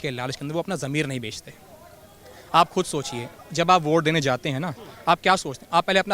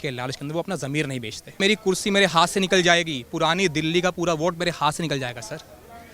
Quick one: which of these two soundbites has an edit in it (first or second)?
second